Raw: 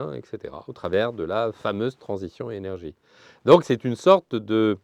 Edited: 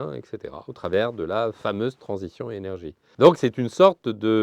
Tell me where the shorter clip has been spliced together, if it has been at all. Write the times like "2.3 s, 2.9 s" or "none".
3.0 s